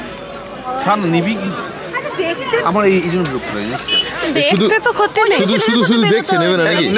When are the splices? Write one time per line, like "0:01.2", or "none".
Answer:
none